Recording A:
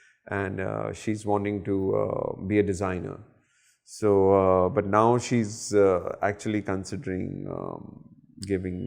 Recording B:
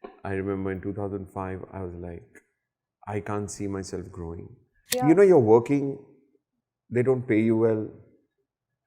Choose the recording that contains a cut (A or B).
B